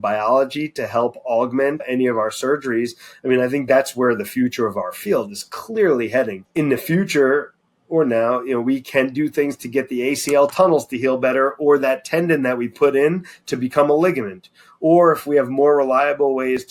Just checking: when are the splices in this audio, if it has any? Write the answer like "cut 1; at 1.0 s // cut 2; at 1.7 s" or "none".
cut 1; at 1.8 s // cut 2; at 6.4 s